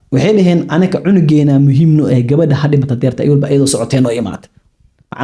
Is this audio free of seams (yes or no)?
yes